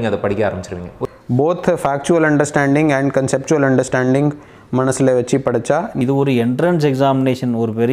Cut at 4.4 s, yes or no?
no